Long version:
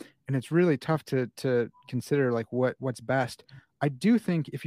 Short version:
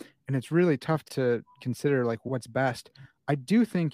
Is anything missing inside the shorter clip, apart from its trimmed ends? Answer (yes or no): yes